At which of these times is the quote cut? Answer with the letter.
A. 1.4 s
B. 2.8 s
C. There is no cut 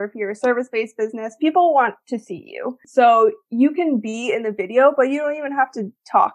B